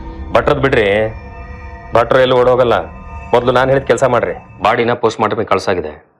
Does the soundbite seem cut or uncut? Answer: cut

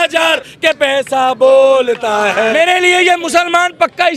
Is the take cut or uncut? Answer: cut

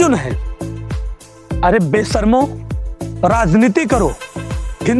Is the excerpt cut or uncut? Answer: uncut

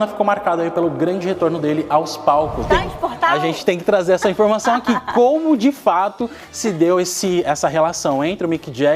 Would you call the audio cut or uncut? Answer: cut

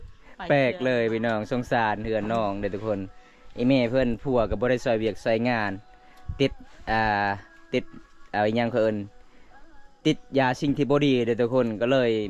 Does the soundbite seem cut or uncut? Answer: uncut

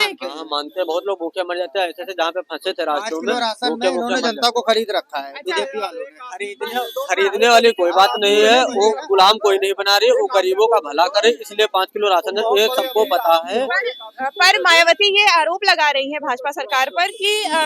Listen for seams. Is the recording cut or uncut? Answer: uncut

